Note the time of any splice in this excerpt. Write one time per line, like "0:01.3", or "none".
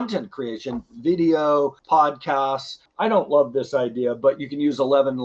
0:01.8
0:02.8